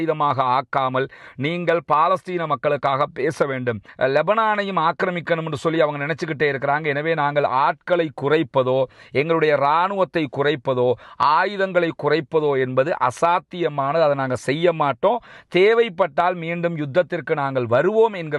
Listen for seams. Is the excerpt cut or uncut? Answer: cut